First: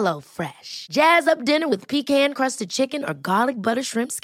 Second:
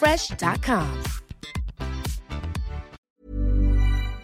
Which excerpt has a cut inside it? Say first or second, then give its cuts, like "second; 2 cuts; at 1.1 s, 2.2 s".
second; 1 cut; at 3.1 s